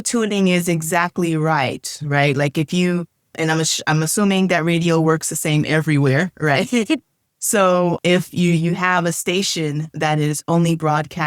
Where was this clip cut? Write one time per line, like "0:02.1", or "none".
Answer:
none